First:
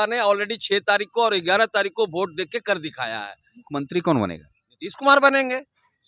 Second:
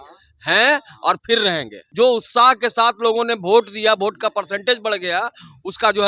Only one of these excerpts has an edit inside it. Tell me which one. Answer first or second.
second